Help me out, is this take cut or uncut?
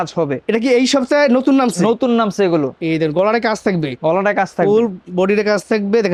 uncut